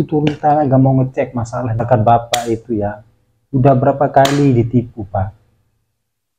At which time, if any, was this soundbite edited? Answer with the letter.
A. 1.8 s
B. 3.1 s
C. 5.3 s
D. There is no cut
A